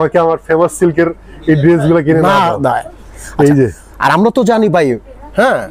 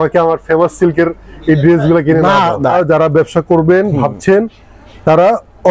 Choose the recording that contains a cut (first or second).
second